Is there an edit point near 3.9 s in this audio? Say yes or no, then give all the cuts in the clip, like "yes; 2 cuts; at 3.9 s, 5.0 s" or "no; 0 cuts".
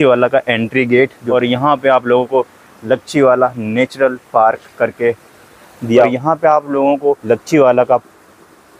no; 3 cuts; at 1.2 s, 5.8 s, 7.2 s